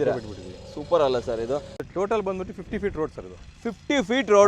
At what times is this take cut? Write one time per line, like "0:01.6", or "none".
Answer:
0:01.7